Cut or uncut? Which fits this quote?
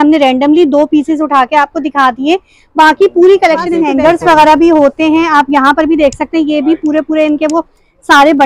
cut